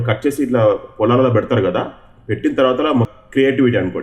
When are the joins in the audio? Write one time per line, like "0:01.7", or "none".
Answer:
0:03.1